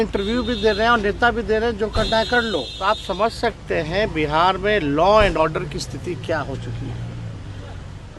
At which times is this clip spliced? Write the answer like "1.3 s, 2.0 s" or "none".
2.7 s